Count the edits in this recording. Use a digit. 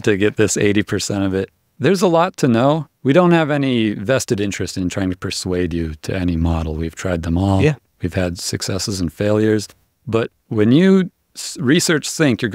2